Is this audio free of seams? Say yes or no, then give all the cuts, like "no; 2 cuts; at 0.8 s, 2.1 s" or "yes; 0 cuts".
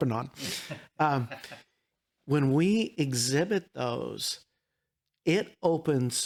yes; 0 cuts